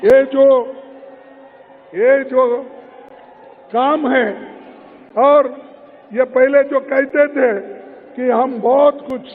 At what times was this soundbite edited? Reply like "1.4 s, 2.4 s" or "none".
none